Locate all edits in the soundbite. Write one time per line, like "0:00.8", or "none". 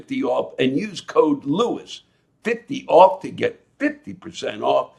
none